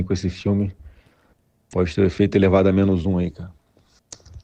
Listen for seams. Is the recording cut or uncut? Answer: uncut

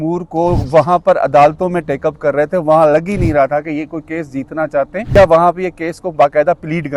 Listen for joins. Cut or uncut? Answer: cut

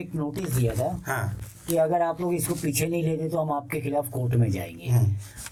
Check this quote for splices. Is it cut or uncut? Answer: uncut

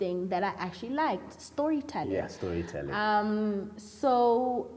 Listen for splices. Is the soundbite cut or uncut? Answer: uncut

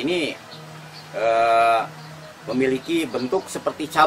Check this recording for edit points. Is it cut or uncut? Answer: uncut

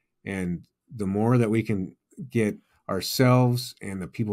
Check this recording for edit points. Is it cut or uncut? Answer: uncut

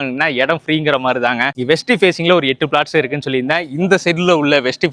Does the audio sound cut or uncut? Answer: uncut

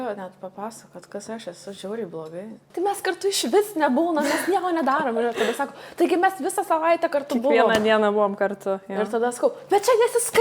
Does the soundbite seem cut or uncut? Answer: cut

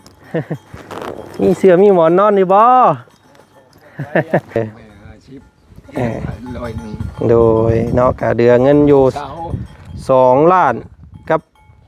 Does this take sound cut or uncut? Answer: cut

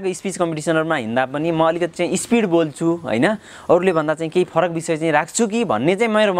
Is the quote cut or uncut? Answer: uncut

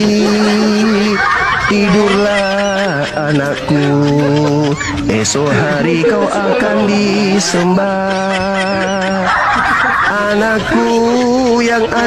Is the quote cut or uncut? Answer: uncut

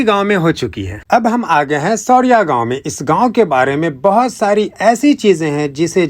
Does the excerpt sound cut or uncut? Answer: cut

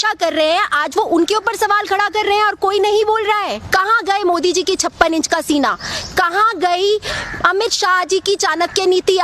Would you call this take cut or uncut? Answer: cut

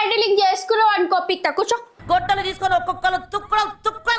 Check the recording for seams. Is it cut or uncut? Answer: uncut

